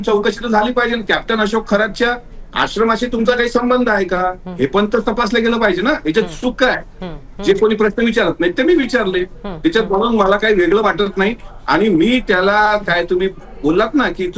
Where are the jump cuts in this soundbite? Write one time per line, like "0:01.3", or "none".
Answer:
none